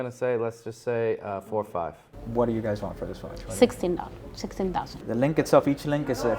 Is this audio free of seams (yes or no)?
no